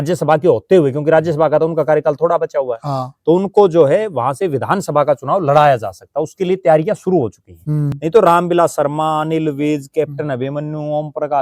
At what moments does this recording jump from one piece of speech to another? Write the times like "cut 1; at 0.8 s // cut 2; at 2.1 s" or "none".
cut 1; at 8.0 s